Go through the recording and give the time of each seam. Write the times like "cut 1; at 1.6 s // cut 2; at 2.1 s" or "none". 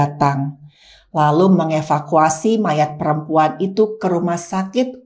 none